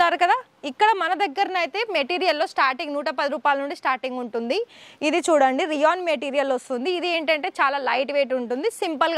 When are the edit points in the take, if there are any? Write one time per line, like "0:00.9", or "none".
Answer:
none